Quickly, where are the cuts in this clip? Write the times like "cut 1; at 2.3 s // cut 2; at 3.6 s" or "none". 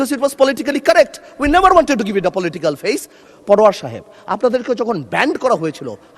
cut 1; at 3.2 s

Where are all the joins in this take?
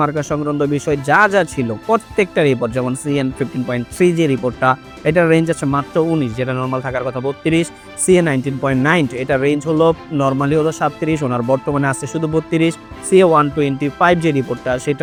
none

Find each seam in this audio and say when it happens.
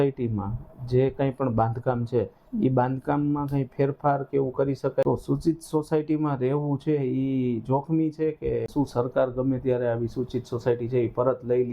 cut 1; at 5.0 s // cut 2; at 8.7 s

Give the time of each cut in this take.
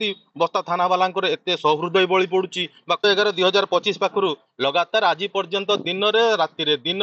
cut 1; at 3.0 s

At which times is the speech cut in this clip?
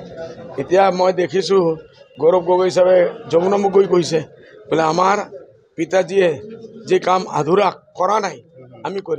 none

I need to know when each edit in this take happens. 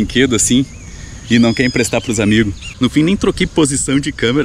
cut 1; at 2.7 s

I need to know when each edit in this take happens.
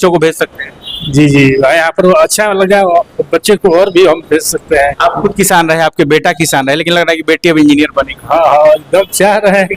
none

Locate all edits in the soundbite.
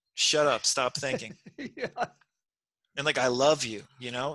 none

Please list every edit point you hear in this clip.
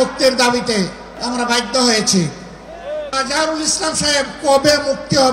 cut 1; at 1.1 s // cut 2; at 3.1 s

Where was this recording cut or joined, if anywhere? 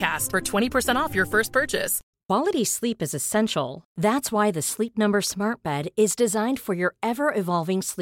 cut 1; at 2.0 s

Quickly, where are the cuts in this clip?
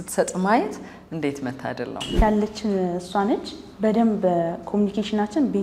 cut 1; at 2.1 s

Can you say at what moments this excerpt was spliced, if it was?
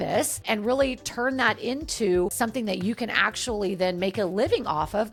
none

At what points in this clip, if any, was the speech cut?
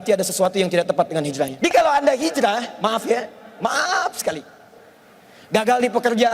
cut 1; at 1.5 s

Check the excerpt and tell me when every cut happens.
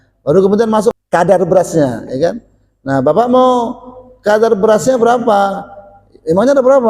cut 1; at 0.9 s

